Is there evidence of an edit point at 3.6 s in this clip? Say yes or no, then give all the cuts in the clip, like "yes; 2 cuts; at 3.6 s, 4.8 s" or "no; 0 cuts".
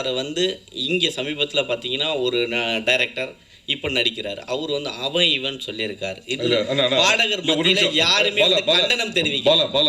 no; 0 cuts